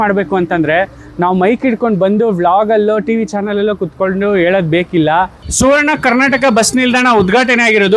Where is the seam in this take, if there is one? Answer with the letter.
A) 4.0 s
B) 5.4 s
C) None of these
B